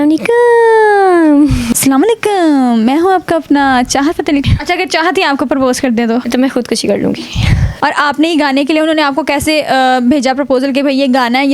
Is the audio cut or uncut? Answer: cut